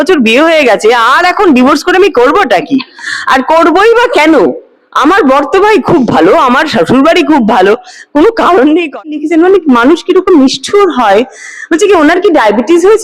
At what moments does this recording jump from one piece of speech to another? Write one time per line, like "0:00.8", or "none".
0:09.2